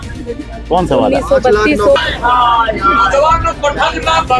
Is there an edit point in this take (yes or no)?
yes